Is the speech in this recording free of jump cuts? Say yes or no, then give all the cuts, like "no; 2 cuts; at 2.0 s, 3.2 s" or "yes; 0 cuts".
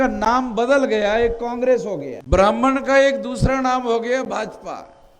no; 1 cut; at 2.1 s